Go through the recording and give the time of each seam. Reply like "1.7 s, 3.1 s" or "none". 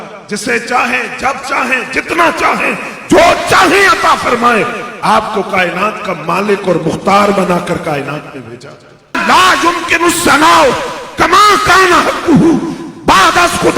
9.2 s